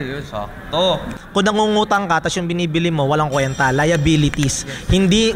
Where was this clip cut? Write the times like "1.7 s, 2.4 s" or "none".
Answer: 1.2 s